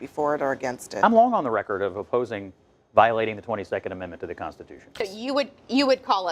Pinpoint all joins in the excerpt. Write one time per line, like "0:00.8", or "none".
0:05.0